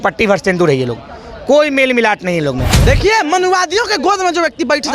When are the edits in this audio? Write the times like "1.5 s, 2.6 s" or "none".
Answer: 2.8 s